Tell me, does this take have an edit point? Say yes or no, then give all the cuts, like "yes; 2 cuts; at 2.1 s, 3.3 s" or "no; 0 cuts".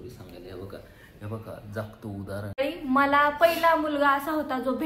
yes; 1 cut; at 2.6 s